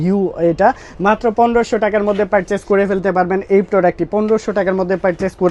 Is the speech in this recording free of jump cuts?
yes; 0 cuts

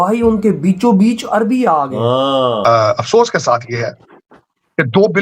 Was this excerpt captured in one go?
no; 1 cut; at 2.6 s

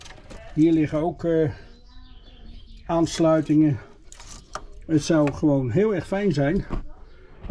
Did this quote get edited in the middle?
no; 0 cuts

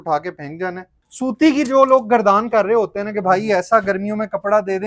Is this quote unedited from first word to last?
no; 1 cut; at 0.9 s

